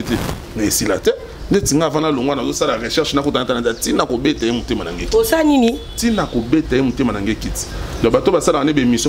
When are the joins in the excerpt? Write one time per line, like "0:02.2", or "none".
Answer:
none